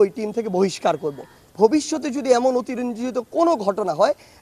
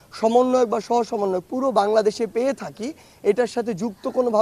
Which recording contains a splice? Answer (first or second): first